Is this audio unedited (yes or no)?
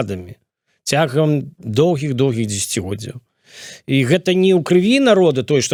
yes